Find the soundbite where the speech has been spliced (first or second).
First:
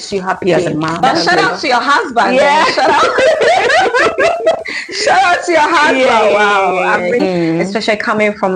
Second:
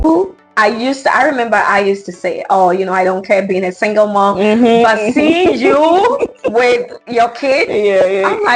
first